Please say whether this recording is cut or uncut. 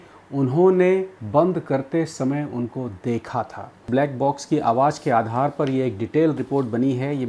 uncut